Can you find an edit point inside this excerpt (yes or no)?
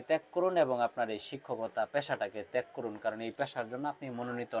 no